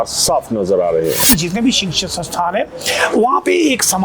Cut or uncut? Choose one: cut